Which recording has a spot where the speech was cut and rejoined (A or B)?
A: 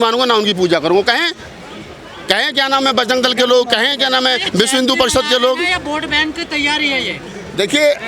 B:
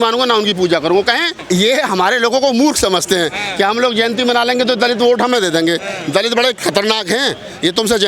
B